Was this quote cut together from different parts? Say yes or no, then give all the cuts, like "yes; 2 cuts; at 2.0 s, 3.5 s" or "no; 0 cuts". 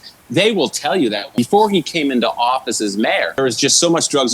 yes; 2 cuts; at 1.3 s, 3.3 s